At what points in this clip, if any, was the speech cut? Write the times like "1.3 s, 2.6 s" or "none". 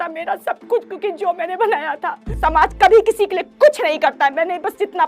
2.3 s